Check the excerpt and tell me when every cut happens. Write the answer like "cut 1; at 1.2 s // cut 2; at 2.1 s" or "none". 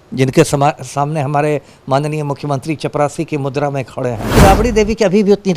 cut 1; at 4.3 s